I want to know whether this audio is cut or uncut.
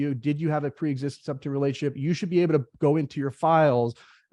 uncut